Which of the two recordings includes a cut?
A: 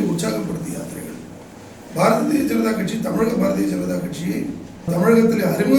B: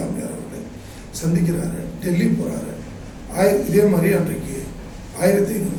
A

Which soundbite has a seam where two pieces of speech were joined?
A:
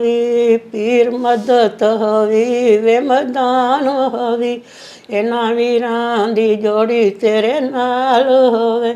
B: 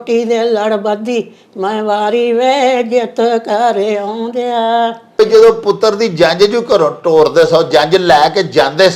B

